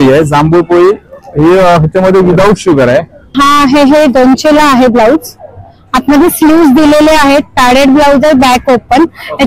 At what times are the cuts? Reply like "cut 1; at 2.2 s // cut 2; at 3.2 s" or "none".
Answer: cut 1; at 3.3 s